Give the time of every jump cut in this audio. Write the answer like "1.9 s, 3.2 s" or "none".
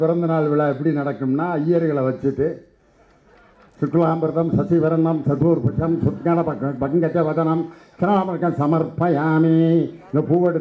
none

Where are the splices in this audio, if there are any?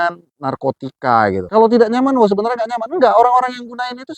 1.4 s

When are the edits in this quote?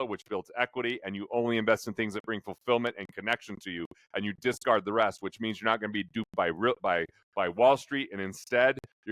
none

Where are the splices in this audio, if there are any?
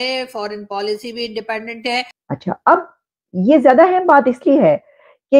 2.2 s

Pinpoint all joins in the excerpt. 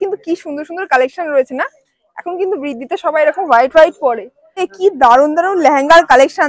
4.7 s

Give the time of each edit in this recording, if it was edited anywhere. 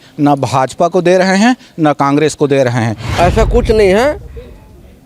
3.0 s

